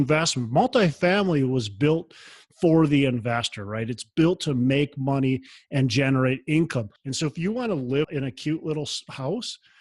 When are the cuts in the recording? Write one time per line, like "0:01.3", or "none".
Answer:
0:07.0
0:08.1